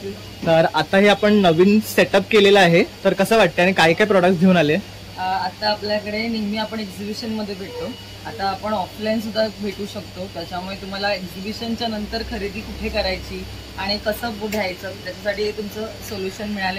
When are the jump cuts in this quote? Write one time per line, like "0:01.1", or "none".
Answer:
none